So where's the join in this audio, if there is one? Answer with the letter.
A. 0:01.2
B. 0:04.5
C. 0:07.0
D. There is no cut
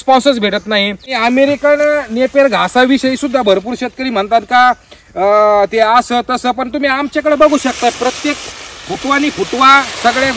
A